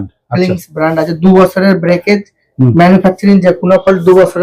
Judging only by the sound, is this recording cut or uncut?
uncut